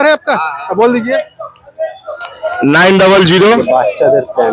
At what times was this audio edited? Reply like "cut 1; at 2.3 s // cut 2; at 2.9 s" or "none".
cut 1; at 3.6 s